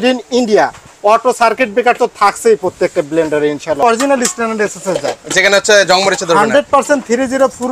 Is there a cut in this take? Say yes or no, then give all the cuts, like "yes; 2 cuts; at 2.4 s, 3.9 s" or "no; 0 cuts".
yes; 1 cut; at 3.8 s